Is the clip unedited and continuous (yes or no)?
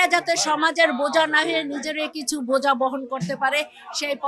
yes